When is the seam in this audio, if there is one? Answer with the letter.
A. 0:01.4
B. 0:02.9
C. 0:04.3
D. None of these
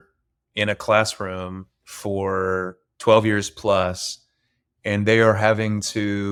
D